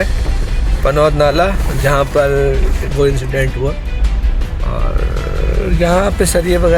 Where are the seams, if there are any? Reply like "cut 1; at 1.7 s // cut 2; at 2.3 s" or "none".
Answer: none